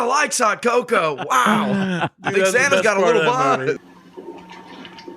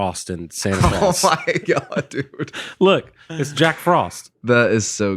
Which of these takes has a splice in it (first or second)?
first